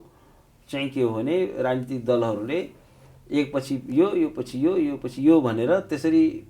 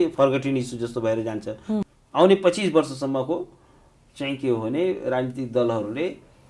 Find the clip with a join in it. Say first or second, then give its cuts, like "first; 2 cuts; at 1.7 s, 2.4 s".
second; 1 cut; at 1.8 s